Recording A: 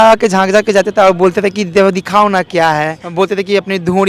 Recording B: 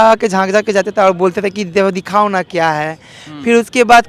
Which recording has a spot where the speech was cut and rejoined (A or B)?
A